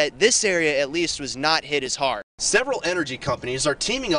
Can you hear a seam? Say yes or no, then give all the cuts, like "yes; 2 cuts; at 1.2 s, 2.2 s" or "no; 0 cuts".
yes; 1 cut; at 2.3 s